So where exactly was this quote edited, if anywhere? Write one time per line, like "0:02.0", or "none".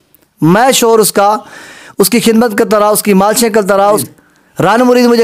0:04.0